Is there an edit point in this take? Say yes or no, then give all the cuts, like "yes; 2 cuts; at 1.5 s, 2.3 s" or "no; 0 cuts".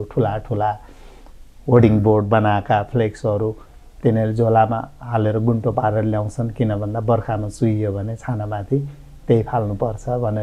no; 0 cuts